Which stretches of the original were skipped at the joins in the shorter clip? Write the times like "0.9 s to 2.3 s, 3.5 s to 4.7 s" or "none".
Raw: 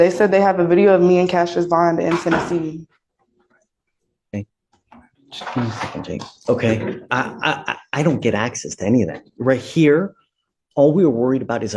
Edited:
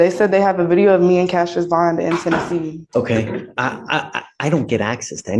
2.8 s to 6.3 s